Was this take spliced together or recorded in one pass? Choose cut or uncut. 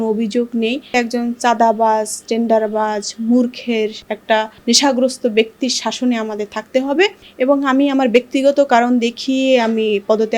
cut